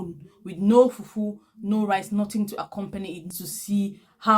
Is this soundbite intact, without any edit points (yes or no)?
no